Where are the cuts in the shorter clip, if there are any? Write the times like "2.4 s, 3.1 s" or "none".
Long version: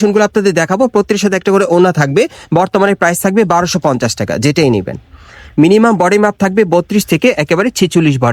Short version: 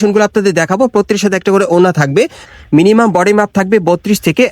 2.4 s

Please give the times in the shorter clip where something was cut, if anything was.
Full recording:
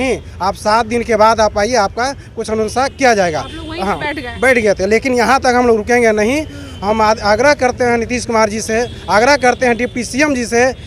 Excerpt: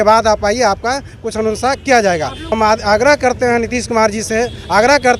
2.4 s

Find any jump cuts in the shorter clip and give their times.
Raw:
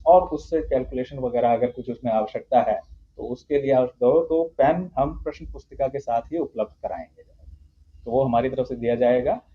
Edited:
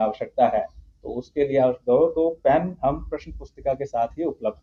none

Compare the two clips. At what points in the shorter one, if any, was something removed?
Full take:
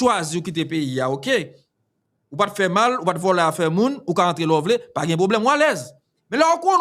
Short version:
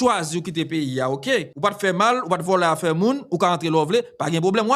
1.5 s

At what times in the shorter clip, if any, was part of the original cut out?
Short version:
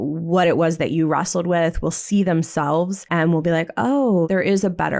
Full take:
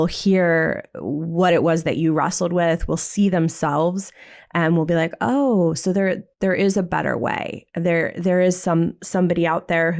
3.0 s, 4.3 s

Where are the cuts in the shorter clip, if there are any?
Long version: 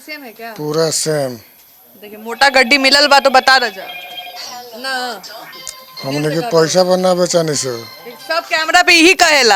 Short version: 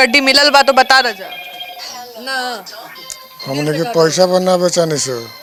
none

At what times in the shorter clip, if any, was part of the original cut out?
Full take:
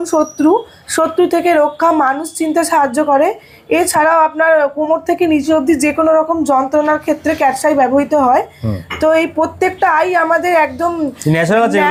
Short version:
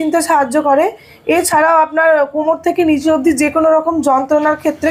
none

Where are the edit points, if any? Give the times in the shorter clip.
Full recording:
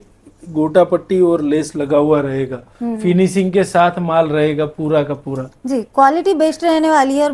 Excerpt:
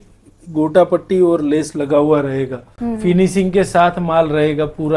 none

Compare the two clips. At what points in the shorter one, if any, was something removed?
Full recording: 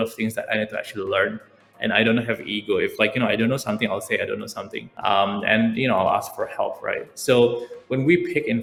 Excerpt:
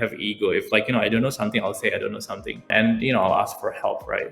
2.7 s

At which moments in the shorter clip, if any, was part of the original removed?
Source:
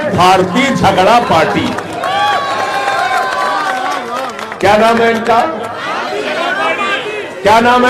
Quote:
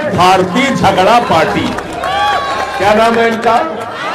2.7 s

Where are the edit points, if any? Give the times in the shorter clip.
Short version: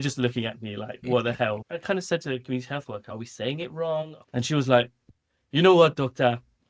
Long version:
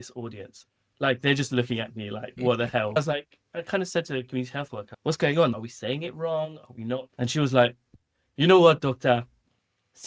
1.6 s, 3.1 s, 4.2 s

